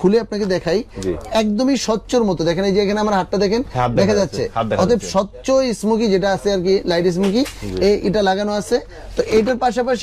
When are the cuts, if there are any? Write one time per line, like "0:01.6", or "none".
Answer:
none